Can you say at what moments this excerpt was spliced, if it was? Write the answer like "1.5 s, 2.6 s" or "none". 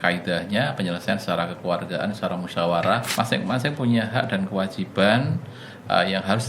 3.1 s